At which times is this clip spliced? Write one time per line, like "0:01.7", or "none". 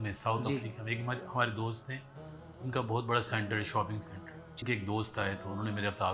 0:04.6